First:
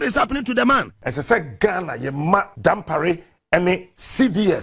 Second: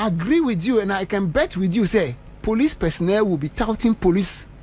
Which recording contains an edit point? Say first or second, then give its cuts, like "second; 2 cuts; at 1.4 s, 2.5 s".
first; 2 cuts; at 1.0 s, 2.5 s